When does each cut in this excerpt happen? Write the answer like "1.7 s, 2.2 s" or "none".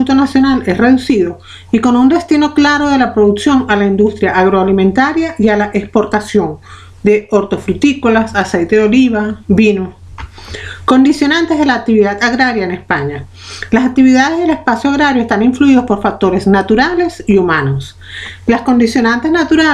8.3 s

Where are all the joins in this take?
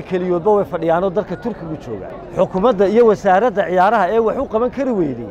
2.1 s

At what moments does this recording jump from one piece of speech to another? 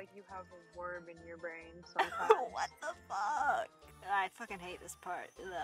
none

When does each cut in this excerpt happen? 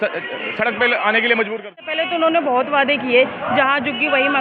2.0 s

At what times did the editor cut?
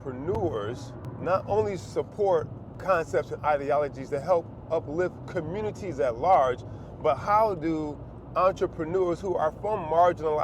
none

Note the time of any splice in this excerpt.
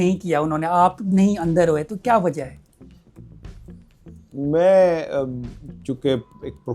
none

